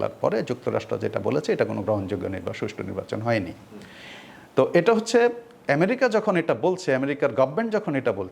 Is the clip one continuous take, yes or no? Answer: yes